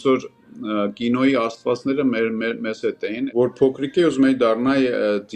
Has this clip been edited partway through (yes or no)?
yes